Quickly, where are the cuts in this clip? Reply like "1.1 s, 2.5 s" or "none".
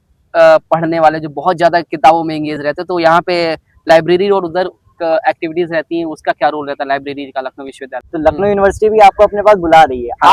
8.1 s